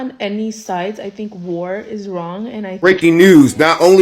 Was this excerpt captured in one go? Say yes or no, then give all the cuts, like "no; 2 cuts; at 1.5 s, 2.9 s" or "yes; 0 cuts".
no; 1 cut; at 2.8 s